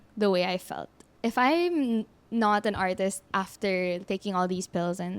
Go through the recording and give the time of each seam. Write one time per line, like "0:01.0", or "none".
0:01.0